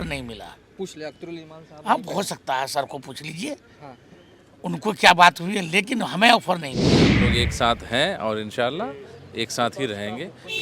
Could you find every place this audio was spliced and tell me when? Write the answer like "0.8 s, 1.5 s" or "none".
7.1 s